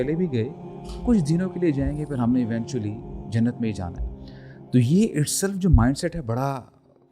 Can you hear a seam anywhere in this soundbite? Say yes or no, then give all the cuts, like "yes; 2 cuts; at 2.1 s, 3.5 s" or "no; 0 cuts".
no; 0 cuts